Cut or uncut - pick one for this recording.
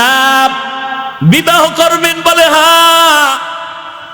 cut